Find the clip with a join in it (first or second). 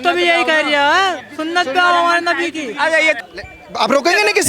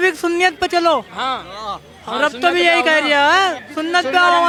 first